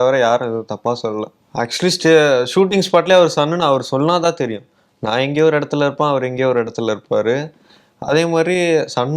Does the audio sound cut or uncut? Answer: cut